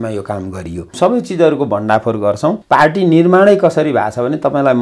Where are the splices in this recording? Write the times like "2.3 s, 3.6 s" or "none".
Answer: 0.9 s, 2.6 s